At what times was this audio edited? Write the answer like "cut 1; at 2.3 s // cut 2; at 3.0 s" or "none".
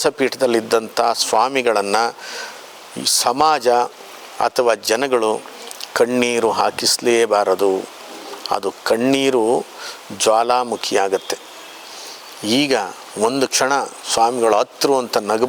none